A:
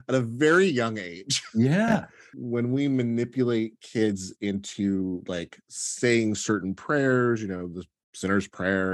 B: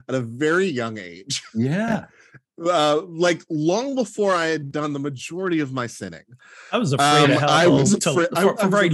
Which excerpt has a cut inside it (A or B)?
A